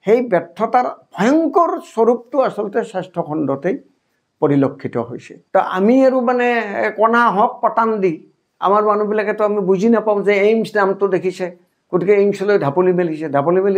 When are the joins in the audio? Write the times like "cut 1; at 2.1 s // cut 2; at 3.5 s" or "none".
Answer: cut 1; at 5.2 s